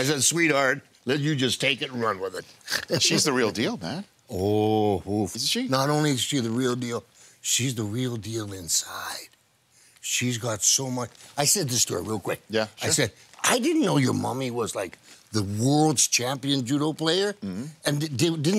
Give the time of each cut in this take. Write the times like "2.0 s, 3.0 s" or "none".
none